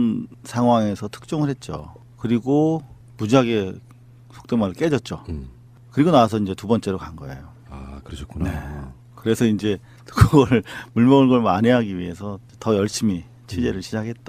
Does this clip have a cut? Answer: no; 0 cuts

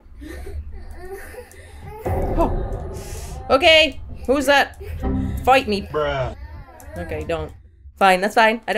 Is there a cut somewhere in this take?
yes; 1 cut; at 7.6 s

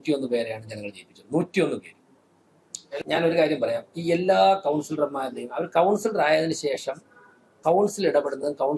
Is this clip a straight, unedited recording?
no; 1 cut; at 3.0 s

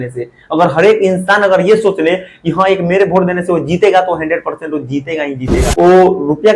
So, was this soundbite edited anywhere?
yes; 1 cut; at 5.6 s

